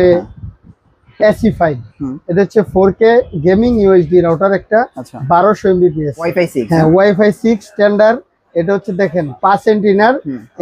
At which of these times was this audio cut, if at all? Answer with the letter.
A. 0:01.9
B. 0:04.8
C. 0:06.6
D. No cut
C